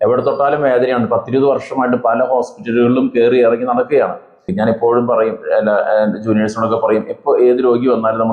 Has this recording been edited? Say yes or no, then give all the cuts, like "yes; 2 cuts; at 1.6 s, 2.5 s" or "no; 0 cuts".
yes; 1 cut; at 4.4 s